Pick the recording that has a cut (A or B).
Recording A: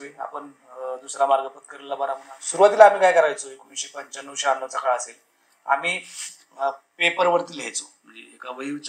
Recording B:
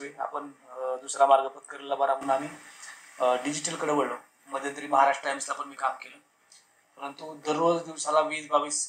A